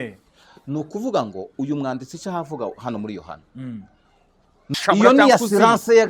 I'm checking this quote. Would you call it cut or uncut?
cut